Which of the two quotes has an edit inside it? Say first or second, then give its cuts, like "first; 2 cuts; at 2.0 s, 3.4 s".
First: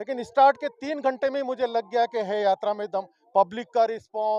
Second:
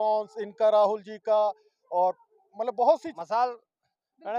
second; 1 cut; at 3.1 s